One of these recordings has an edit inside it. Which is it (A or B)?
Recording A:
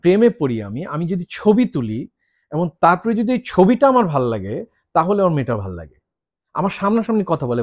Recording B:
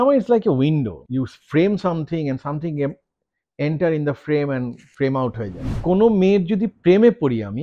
B